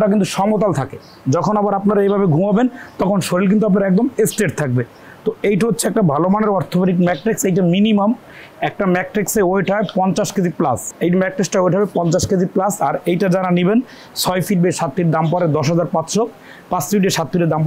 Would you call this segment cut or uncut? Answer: uncut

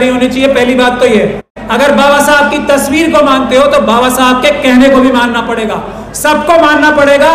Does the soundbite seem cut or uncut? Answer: cut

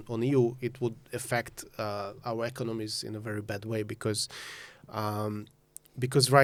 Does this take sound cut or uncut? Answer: uncut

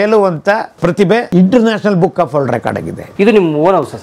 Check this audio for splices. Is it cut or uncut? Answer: cut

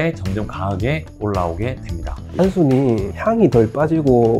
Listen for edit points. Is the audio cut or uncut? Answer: cut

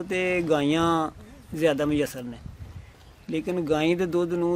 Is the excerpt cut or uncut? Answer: uncut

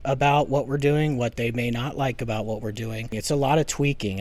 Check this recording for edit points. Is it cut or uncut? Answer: cut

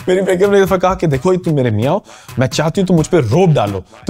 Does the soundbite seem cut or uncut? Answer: uncut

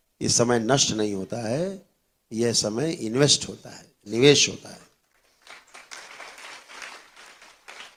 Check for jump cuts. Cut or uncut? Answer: uncut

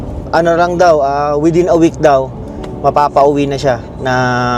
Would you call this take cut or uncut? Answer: uncut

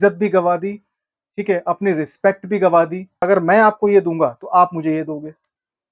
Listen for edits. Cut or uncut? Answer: cut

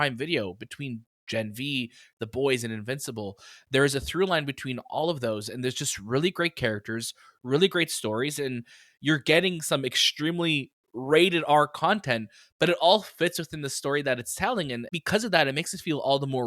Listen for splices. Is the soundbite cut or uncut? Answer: cut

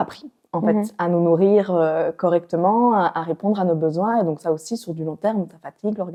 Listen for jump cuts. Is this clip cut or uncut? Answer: uncut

